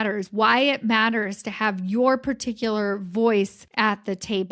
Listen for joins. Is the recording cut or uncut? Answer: cut